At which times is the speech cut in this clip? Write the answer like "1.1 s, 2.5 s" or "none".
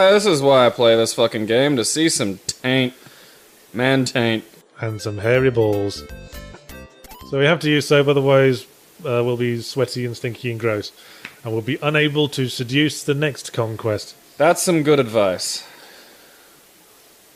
none